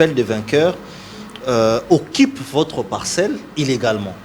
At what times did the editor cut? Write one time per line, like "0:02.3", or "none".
none

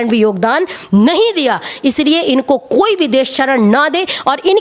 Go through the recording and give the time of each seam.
none

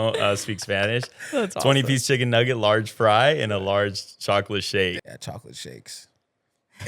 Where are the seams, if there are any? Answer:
0:05.0

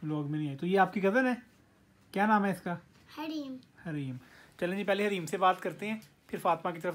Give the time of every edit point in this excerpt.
none

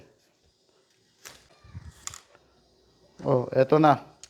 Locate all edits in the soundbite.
0:01.5

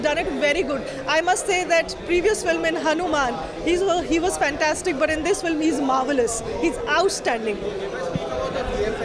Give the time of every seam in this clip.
none

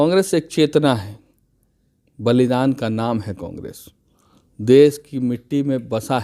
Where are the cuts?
none

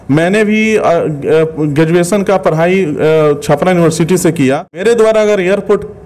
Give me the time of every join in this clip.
0:04.8

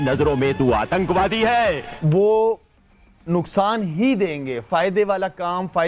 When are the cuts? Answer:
0:01.9

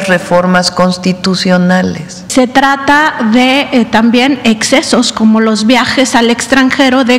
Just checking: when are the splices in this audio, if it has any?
0:02.3

